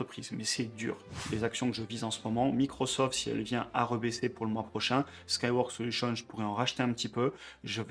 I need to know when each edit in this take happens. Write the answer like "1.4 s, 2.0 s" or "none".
1.2 s